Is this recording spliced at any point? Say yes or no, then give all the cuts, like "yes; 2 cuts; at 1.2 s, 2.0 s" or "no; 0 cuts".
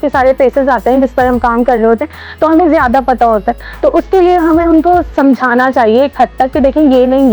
no; 0 cuts